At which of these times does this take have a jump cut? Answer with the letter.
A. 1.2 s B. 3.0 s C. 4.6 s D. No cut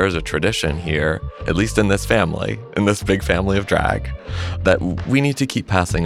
D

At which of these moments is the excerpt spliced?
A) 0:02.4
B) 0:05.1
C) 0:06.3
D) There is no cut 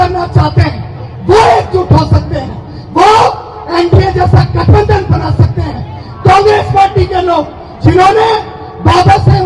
D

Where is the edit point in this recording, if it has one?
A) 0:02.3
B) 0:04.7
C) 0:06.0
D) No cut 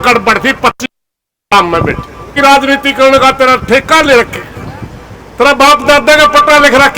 A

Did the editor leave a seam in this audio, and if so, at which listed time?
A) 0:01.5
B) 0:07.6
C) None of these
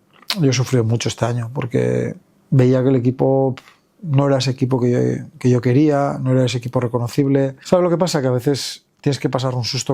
B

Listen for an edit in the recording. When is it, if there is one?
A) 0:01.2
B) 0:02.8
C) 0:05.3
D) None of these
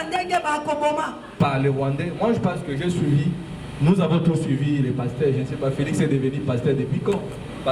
A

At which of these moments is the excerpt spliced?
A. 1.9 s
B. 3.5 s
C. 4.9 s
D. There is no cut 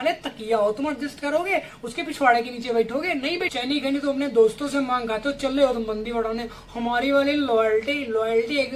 B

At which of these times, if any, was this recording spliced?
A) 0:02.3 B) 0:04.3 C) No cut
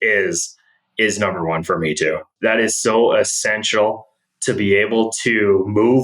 A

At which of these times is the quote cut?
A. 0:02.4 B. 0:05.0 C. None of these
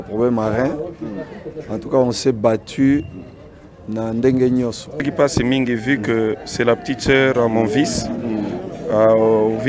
B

